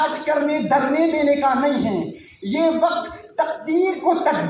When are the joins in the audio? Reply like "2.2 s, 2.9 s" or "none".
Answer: none